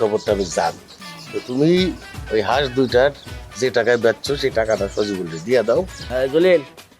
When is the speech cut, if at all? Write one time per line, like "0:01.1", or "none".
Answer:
0:06.0